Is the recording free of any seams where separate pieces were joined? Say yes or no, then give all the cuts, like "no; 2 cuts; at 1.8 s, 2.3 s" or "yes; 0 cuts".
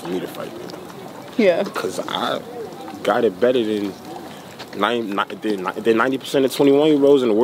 yes; 0 cuts